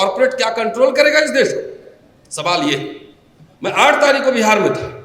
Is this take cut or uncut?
uncut